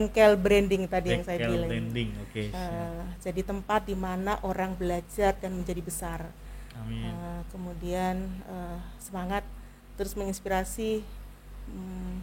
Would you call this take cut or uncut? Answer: uncut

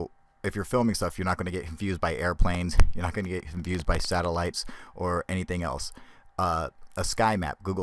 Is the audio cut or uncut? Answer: uncut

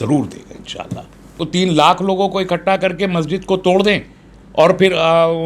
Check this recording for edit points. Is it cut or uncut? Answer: cut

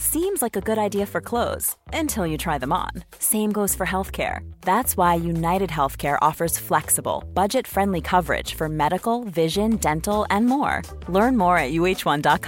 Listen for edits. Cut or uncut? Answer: uncut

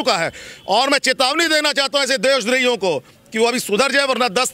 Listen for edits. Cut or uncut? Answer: uncut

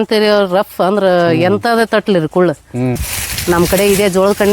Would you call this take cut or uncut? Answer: cut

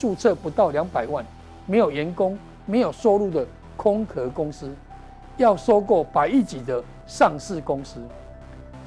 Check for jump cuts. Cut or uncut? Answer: uncut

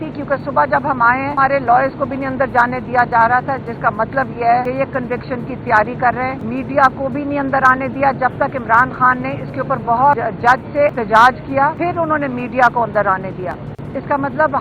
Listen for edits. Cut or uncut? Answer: cut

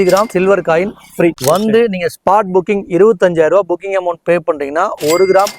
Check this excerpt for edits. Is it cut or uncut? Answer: uncut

